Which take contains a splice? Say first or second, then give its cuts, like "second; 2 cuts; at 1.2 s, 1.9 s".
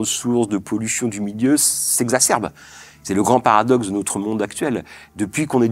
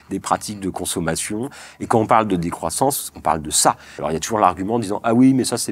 second; 1 cut; at 4.0 s